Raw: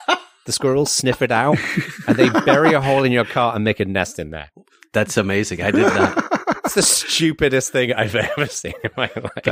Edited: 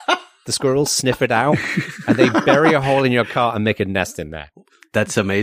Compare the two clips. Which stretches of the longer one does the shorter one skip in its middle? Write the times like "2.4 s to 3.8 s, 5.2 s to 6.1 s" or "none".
none

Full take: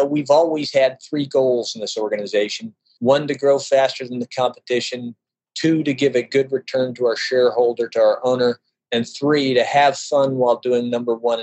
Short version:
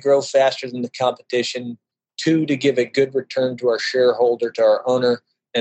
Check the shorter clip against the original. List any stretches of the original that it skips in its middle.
none

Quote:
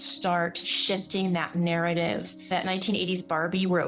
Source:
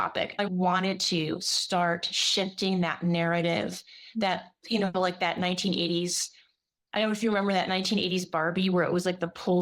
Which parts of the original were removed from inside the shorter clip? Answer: 4.0 s to 7.5 s

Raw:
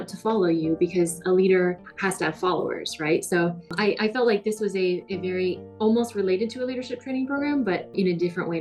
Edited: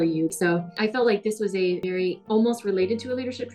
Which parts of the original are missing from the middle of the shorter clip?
1.2 s to 4.0 s, 5.2 s to 5.5 s

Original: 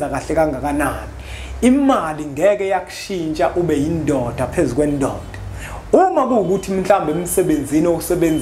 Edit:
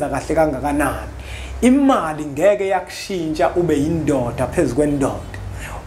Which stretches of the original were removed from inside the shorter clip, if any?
none

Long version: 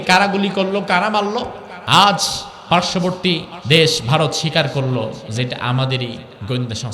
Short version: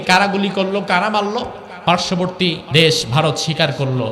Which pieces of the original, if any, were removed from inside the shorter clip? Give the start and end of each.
1.6 s to 2.5 s, 3.5 s to 3.6 s

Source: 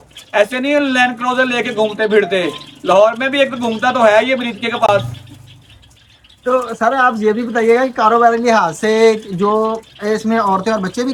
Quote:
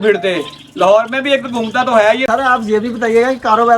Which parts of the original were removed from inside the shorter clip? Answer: 4.3 s to 6.8 s

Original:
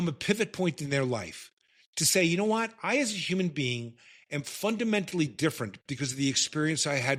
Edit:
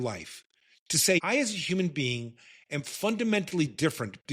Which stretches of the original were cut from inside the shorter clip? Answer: 2.3 s to 2.8 s

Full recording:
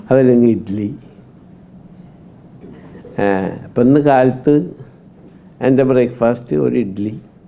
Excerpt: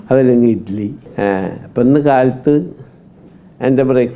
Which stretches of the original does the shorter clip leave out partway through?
1.0 s to 3.0 s

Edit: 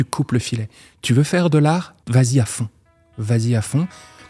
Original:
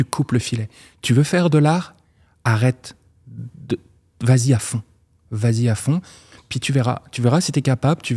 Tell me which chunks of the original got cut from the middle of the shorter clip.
2.0 s to 4.1 s

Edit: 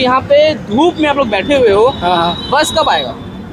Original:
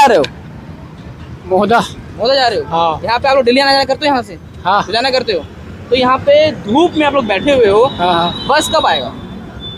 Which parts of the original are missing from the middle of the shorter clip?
none

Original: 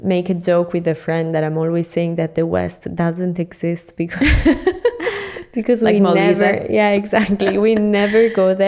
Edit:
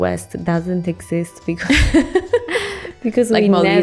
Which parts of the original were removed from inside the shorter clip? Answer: none

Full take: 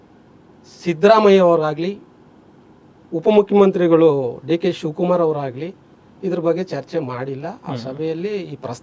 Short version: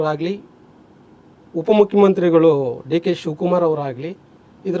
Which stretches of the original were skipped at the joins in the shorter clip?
none

